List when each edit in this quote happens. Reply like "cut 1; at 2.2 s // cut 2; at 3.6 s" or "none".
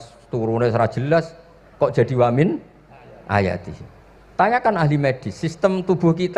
none